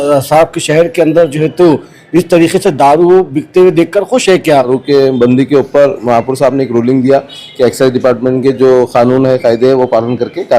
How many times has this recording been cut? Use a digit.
1